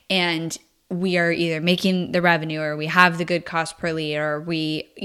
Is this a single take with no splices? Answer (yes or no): yes